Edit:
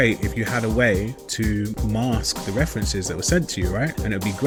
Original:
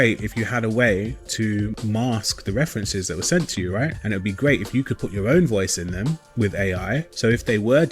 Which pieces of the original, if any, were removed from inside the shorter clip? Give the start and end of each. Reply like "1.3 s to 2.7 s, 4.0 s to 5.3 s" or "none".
none